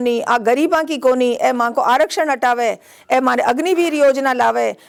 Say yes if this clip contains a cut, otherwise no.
no